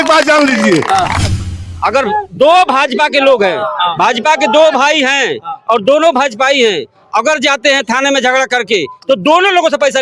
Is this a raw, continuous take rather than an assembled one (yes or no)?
no